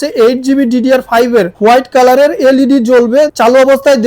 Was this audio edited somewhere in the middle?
yes; 1 cut; at 1.5 s

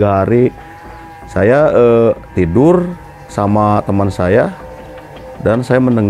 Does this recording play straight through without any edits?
yes; 0 cuts

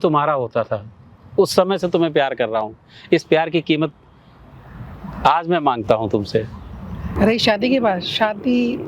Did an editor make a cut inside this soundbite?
yes; 1 cut; at 7.0 s

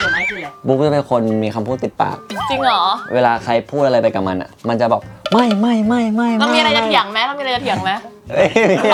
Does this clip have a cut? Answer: no; 0 cuts

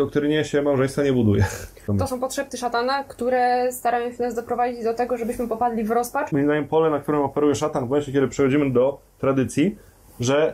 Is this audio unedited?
no; 2 cuts; at 1.9 s, 6.2 s

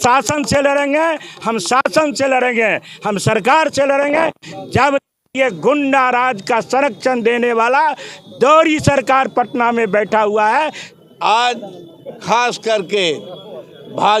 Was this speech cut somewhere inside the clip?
yes; 1 cut; at 10.9 s

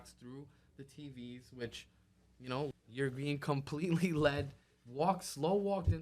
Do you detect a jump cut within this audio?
yes; 1 cut; at 2.8 s

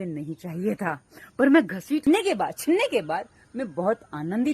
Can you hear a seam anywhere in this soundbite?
yes; 1 cut; at 2.1 s

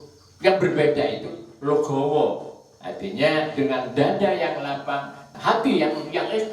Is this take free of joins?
no; 1 cut; at 5.2 s

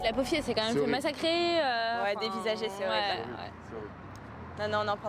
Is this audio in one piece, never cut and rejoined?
yes; 0 cuts

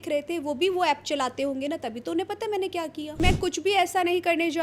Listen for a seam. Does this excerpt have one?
yes; 1 cut; at 3.2 s

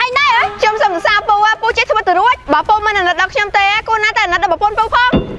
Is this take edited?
no; 0 cuts

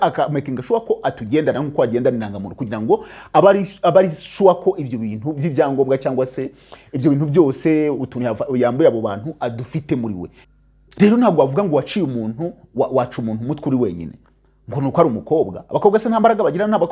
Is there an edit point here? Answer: yes; 1 cut; at 10.4 s

